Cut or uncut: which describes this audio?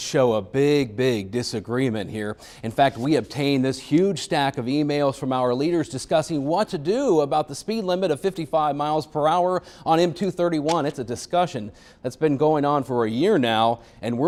uncut